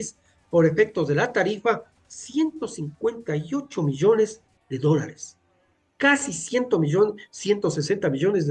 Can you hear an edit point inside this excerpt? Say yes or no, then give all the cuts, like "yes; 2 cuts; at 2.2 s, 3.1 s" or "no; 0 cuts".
no; 0 cuts